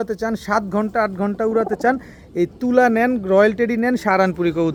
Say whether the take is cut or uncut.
uncut